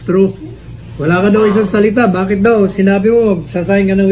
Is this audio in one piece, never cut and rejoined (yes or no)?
yes